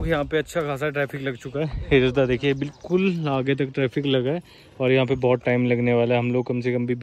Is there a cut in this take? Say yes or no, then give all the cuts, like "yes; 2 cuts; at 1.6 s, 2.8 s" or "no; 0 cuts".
no; 0 cuts